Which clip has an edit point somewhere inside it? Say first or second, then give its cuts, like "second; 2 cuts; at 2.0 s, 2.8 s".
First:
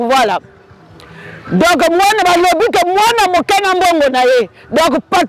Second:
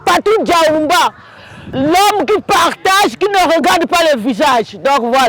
second; 1 cut; at 1.7 s